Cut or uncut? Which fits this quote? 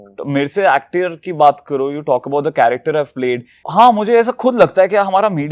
cut